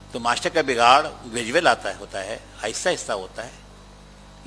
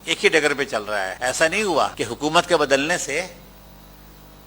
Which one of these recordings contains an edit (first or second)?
second